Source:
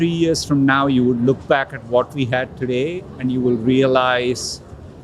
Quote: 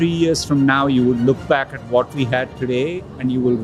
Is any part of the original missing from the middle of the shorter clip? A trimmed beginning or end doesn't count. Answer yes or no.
no